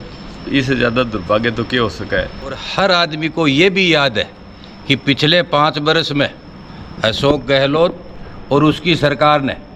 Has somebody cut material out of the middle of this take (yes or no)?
yes